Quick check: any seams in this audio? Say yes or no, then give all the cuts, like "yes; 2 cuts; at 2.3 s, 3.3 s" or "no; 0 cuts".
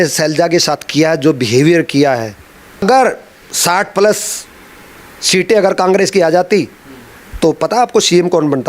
yes; 1 cut; at 2.8 s